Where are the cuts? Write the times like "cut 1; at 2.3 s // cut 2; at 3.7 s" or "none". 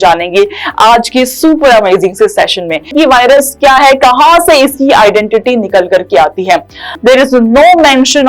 cut 1; at 2.9 s // cut 2; at 6.9 s